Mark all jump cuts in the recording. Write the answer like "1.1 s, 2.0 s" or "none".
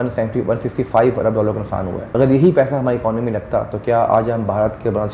2.1 s